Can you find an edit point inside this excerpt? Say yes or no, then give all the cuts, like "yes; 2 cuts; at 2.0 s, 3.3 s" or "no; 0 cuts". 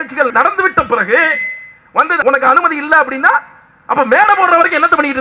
yes; 1 cut; at 2.2 s